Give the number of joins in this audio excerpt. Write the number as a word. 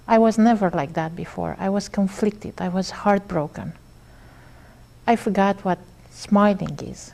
zero